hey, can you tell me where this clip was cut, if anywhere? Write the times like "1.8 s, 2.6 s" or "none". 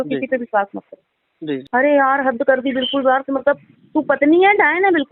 1.6 s

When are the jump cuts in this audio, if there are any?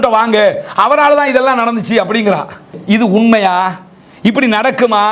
2.7 s

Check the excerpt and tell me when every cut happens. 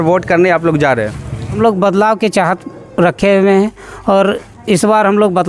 1.6 s

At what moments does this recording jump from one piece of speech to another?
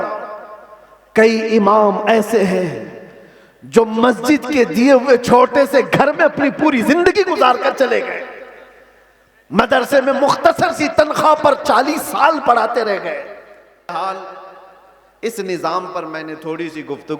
14.0 s

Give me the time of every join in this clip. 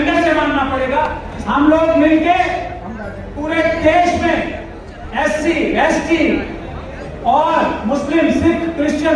1.3 s

